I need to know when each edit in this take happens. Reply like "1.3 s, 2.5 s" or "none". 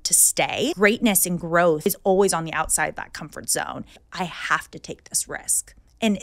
0.8 s, 1.8 s, 4.0 s